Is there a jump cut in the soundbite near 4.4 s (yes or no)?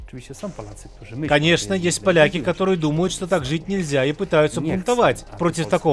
no